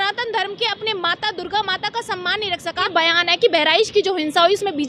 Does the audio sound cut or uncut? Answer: cut